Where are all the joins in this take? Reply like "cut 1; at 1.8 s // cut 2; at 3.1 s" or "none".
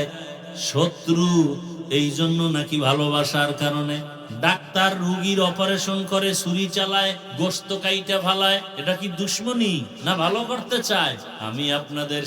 cut 1; at 4.2 s // cut 2; at 7.2 s // cut 3; at 8.7 s // cut 4; at 9.9 s // cut 5; at 11.3 s